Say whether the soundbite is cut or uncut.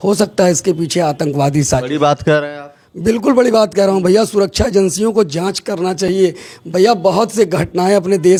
uncut